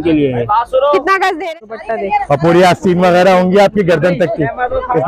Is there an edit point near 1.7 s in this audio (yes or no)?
yes